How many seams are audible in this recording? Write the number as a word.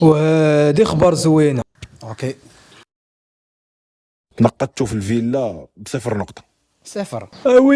zero